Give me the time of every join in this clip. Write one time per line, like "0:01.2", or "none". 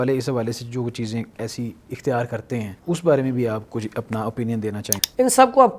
0:02.7
0:04.9